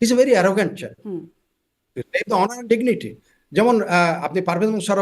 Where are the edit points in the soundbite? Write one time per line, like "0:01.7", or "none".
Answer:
none

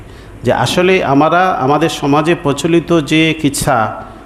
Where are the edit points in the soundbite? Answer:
none

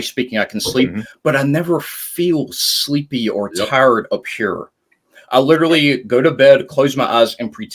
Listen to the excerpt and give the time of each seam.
none

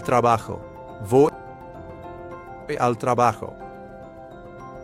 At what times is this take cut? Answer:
none

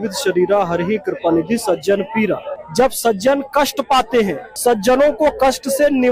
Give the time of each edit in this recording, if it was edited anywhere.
0:02.6
0:04.5

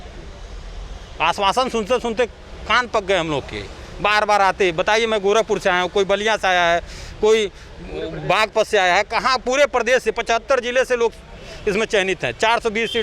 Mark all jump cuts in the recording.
none

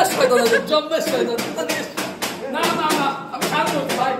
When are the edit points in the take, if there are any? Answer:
none

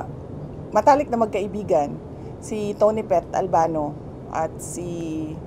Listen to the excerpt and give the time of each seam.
none

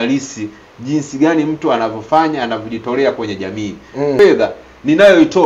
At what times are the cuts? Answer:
0:04.2

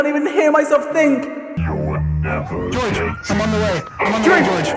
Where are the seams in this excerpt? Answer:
0:01.5

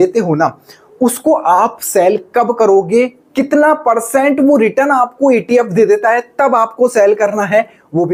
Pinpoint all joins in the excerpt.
none

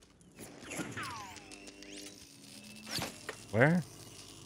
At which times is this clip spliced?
none

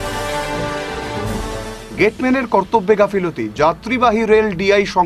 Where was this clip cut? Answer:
0:01.2

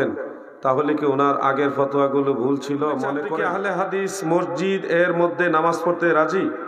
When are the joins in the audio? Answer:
0:03.4

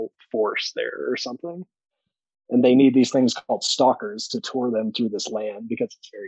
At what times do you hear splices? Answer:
none

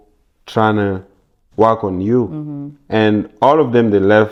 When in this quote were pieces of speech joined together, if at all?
none

